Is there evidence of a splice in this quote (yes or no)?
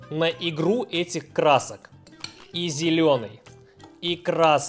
no